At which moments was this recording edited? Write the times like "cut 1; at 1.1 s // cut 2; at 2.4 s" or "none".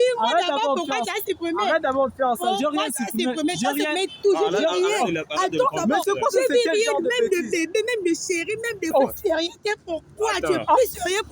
cut 1; at 8.9 s